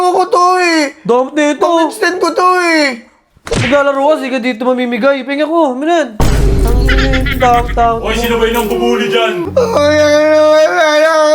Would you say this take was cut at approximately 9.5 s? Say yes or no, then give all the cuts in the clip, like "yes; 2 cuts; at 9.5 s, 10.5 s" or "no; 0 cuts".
yes; 1 cut; at 9.5 s